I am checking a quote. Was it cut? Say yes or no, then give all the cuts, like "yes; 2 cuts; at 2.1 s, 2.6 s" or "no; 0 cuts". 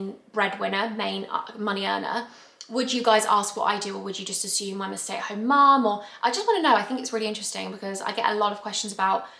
no; 0 cuts